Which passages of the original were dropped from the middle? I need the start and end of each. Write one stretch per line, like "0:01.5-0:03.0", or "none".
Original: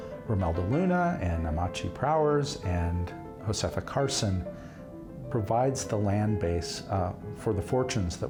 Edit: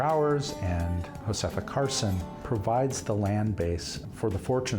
0:03.1-0:03.3
0:04.5-0:05.2
0:06.8-0:07.2